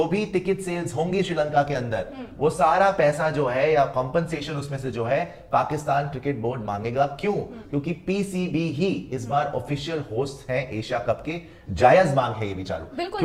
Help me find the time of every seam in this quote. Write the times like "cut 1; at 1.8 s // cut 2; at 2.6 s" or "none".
none